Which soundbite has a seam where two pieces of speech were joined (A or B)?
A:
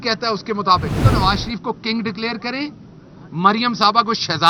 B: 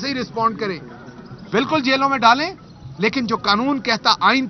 A